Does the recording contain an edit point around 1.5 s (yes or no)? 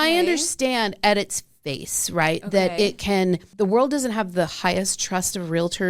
no